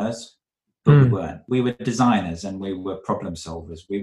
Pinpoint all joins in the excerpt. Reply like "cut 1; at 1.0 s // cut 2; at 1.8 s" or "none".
cut 1; at 1.4 s